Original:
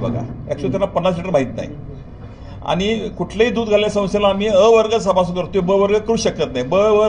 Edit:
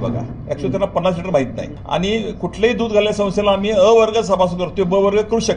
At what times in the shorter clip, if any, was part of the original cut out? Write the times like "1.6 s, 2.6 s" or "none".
1.7 s